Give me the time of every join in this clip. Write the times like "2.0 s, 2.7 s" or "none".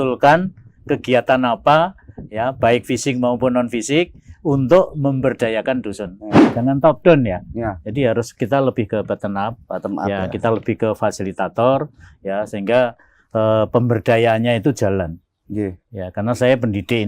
6.5 s